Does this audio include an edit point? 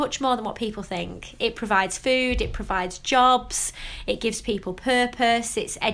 no; 0 cuts

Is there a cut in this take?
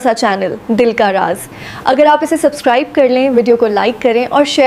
no; 0 cuts

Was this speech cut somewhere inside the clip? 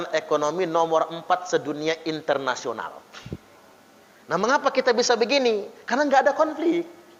no; 0 cuts

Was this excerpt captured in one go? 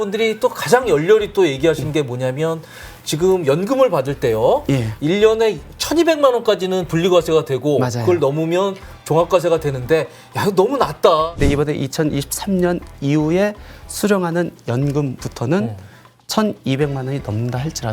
no; 1 cut; at 11.3 s

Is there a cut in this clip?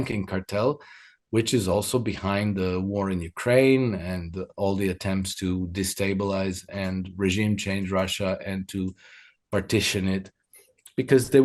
no; 0 cuts

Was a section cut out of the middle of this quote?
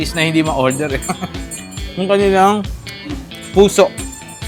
no; 0 cuts

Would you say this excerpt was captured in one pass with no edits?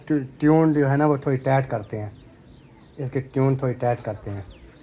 yes; 0 cuts

